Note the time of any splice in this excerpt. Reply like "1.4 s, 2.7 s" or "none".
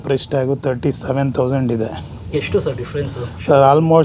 2.2 s